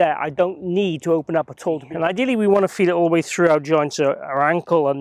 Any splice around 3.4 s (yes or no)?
no